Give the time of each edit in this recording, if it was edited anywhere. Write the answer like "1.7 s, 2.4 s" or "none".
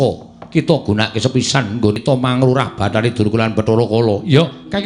2.0 s